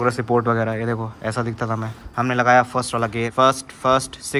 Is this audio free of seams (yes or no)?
no